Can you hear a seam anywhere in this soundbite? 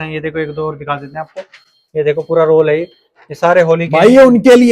no; 0 cuts

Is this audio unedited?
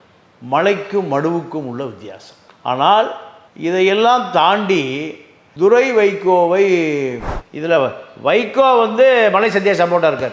no; 1 cut; at 7.2 s

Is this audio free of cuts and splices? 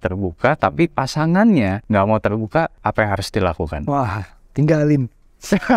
no; 2 cuts; at 1.8 s, 2.8 s

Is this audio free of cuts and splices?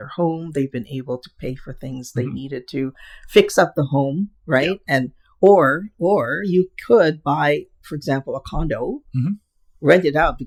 yes; 0 cuts

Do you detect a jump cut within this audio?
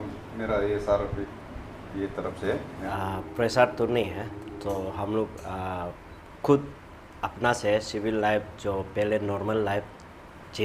yes; 1 cut; at 2.8 s

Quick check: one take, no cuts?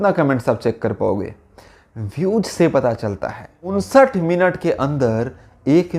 no; 1 cut; at 3.7 s

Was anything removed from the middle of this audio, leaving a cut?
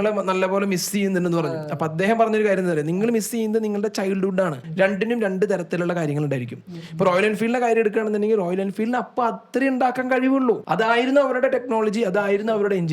yes; 1 cut; at 4.6 s

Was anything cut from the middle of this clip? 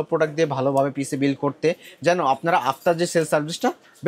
no; 0 cuts

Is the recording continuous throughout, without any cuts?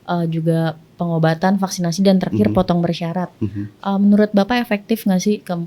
yes; 0 cuts

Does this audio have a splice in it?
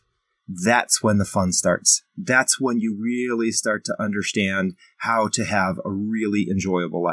no; 0 cuts

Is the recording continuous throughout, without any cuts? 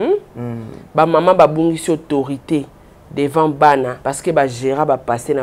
no; 1 cut; at 4.0 s

